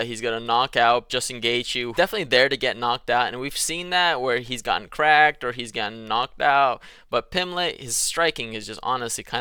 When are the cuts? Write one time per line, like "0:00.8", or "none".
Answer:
none